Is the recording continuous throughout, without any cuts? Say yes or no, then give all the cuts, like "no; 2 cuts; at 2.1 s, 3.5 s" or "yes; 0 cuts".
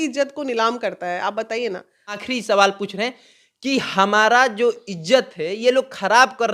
yes; 0 cuts